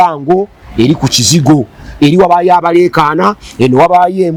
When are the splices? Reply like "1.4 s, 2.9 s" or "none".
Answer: none